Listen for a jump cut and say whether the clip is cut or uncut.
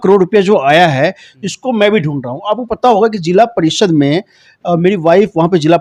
uncut